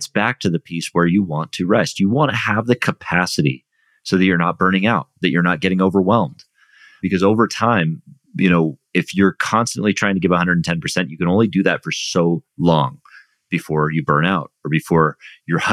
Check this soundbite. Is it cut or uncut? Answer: cut